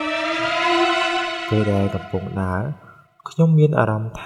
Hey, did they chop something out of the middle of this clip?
yes; 1 cut; at 1.4 s

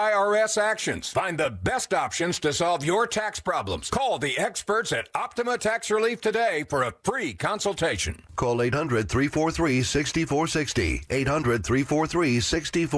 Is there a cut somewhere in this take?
no; 0 cuts

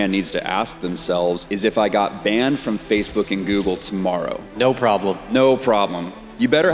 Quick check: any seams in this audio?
yes; 2 cuts; at 1.4 s, 4.4 s

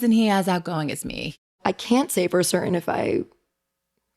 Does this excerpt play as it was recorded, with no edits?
no; 1 cut; at 1.5 s

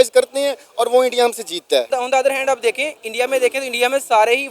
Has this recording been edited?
yes; 1 cut; at 1.9 s

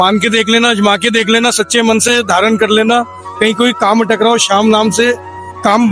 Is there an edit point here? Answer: no; 0 cuts

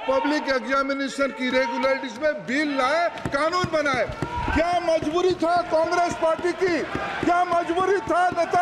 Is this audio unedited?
yes; 0 cuts

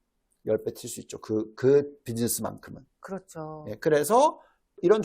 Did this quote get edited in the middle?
no; 0 cuts

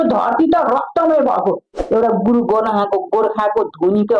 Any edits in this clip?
yes; 1 cut; at 1.7 s

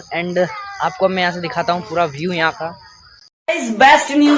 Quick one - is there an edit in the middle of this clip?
yes; 1 cut; at 3.3 s

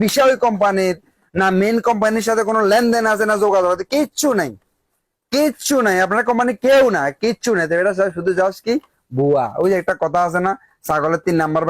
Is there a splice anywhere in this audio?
no; 0 cuts

